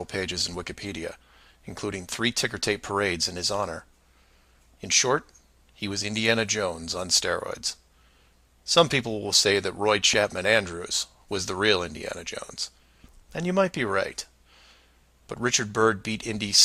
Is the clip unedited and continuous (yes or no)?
yes